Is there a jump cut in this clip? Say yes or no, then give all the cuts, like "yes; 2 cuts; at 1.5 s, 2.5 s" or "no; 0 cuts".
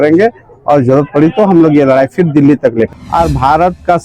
yes; 1 cut; at 3.0 s